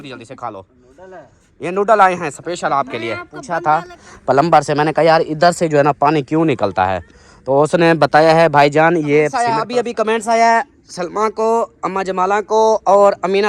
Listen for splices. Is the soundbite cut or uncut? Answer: cut